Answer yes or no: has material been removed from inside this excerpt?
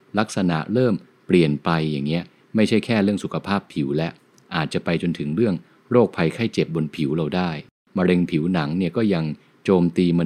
yes